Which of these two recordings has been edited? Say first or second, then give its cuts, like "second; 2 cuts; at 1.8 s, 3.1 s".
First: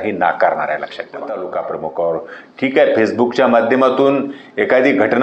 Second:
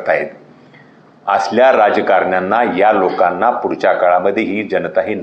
first; 1 cut; at 1.3 s